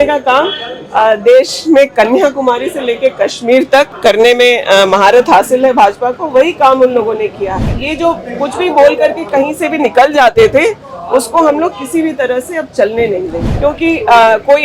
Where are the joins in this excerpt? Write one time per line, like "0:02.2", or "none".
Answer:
0:03.9
0:07.8
0:13.4